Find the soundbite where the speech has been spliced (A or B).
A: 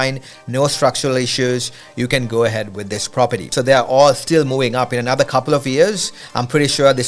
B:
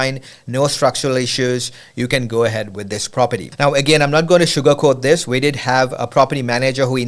A